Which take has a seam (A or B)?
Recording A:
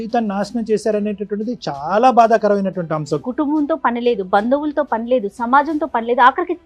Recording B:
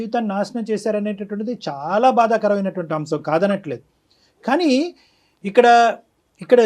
A